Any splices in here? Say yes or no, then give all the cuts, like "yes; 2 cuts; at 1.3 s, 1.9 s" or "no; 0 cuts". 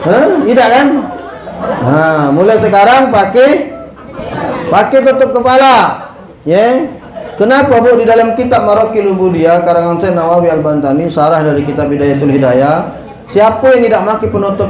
no; 0 cuts